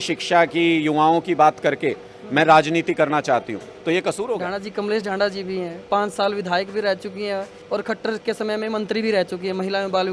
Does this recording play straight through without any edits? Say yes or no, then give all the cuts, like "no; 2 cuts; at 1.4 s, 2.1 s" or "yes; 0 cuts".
no; 3 cuts; at 4.4 s, 5.8 s, 7.5 s